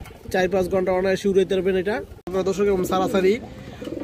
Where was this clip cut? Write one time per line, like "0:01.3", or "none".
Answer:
0:02.3